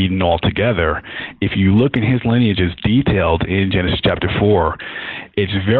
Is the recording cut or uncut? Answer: uncut